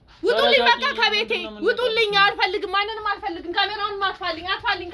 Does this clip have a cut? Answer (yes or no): no